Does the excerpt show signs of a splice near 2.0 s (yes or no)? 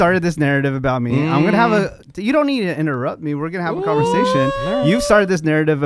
no